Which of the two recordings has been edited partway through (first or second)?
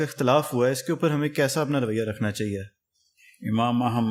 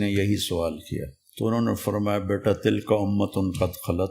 second